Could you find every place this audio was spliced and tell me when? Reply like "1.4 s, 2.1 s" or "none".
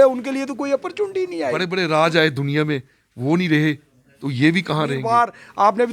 1.6 s, 5.0 s